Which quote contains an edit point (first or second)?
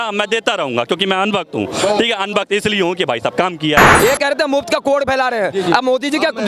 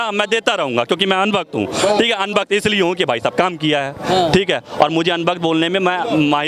first